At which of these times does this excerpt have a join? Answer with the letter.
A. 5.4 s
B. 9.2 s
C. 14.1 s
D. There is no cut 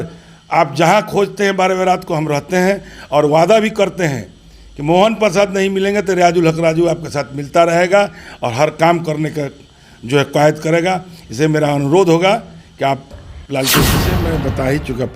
C